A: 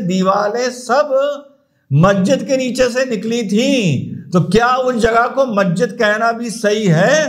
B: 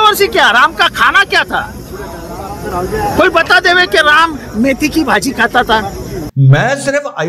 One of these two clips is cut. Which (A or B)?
B